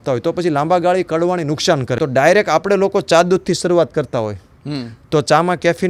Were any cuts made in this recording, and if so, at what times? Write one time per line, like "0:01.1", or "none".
0:01.9